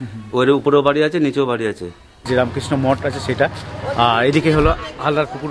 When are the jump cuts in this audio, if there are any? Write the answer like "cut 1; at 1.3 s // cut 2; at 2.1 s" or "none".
cut 1; at 2.2 s